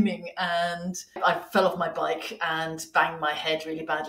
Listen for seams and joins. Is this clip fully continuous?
no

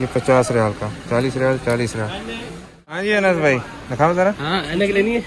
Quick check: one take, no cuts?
no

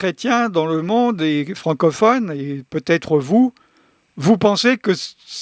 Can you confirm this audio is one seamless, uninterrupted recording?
yes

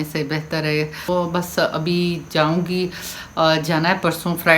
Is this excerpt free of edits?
no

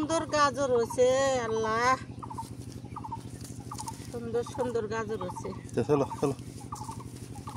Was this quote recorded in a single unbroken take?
yes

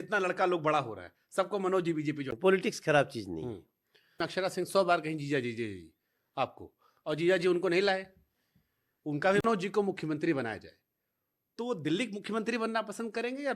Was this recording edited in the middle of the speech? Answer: yes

